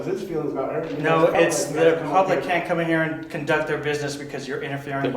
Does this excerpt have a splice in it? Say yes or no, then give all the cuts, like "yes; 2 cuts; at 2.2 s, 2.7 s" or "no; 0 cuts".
no; 0 cuts